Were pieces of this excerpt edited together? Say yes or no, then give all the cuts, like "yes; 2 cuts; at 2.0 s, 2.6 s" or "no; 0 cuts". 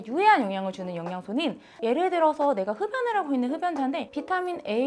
yes; 1 cut; at 1.7 s